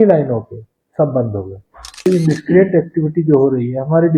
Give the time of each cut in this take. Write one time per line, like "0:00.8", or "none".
0:02.1